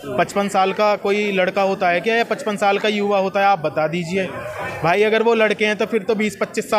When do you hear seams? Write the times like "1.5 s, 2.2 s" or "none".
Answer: none